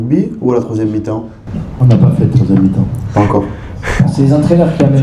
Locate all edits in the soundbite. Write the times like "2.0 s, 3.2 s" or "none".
none